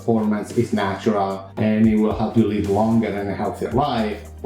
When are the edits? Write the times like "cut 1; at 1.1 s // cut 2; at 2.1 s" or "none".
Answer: cut 1; at 1.4 s

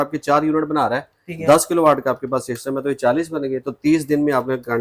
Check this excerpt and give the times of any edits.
none

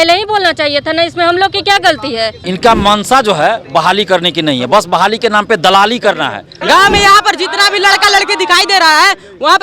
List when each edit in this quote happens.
cut 1; at 2.4 s // cut 2; at 6.5 s

